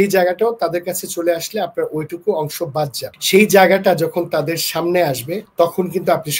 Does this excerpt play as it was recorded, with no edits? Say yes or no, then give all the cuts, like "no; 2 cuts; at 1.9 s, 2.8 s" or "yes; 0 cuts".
no; 2 cuts; at 3.1 s, 5.4 s